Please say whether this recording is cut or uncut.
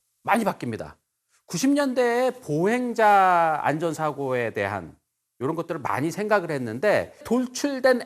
cut